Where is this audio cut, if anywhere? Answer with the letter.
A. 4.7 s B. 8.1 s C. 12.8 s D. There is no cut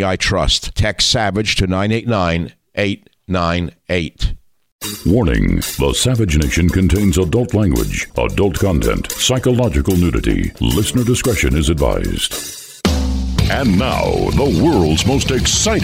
A